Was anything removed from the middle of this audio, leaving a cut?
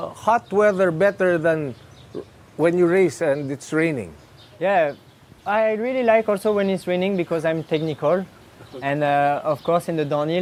no; 0 cuts

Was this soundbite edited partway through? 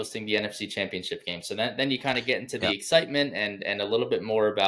no; 0 cuts

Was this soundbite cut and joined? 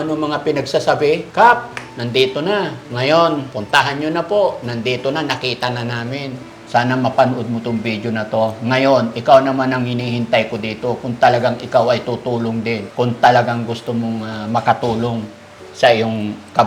yes; 5 cuts; at 1.3 s, 2.8 s, 3.5 s, 6.5 s, 12.9 s

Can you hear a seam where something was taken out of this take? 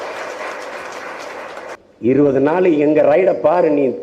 yes; 1 cut; at 1.8 s

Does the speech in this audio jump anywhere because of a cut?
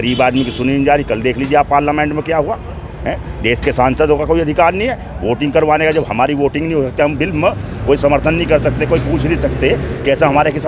no; 0 cuts

